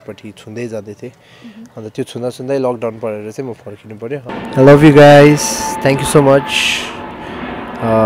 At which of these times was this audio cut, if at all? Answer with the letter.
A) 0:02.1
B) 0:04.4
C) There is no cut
B